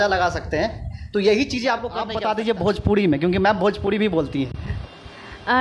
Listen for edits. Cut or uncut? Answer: cut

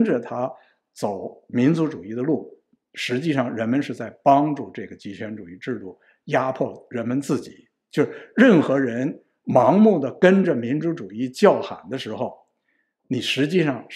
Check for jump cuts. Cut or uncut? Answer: uncut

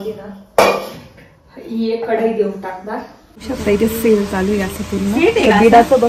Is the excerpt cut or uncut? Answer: cut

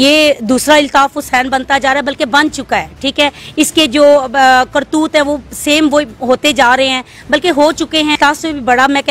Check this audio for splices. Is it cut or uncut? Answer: cut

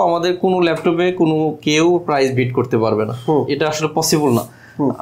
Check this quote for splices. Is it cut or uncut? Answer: uncut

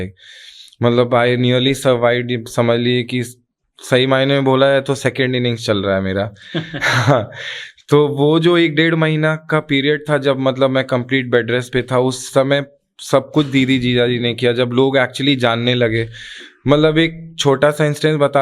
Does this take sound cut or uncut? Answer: uncut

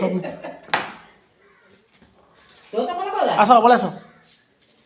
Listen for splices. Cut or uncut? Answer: uncut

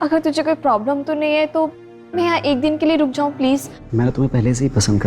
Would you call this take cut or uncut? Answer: cut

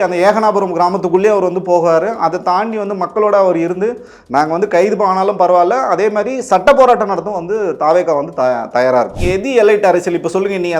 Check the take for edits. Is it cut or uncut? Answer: cut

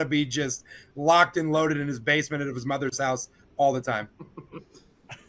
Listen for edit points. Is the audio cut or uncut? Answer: uncut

